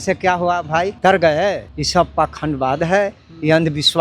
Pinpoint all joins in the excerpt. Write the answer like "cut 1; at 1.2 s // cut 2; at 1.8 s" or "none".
cut 1; at 0.9 s // cut 2; at 1.7 s